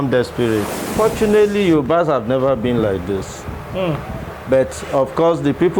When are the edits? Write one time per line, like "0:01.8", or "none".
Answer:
0:00.9